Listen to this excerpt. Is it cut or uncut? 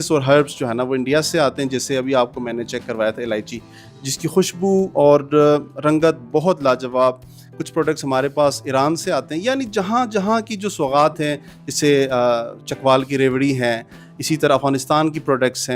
uncut